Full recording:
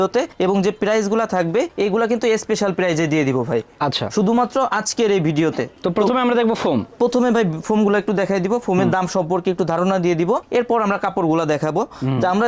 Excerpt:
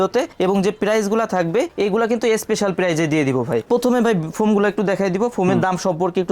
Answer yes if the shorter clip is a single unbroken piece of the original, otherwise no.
no